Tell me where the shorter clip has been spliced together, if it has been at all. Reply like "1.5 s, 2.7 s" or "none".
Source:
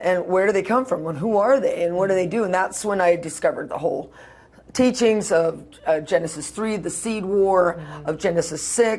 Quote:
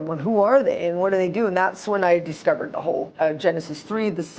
3.1 s